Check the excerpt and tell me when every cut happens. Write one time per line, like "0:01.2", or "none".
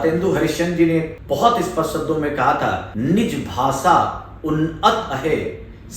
0:01.2
0:02.9